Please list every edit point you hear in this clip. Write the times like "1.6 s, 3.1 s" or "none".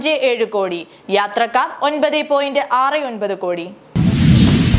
3.8 s